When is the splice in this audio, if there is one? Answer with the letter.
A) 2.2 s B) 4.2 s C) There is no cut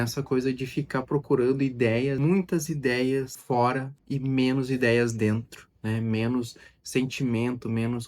A